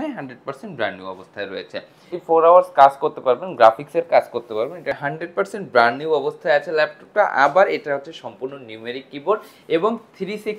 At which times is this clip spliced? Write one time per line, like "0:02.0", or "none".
0:02.1
0:05.0

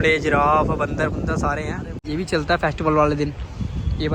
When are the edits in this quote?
0:02.0

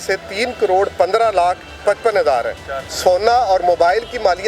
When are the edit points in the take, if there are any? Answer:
0:02.9

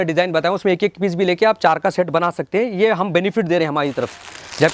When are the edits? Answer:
none

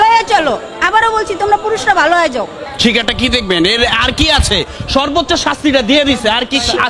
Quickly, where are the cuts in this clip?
0:02.6

